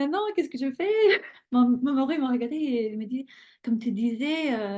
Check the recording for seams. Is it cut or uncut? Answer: uncut